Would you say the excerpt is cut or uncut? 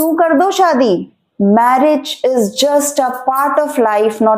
cut